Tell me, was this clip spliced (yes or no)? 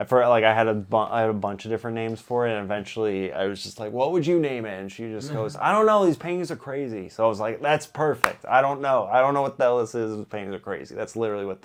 no